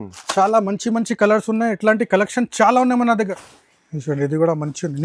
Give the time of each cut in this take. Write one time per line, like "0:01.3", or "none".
0:03.2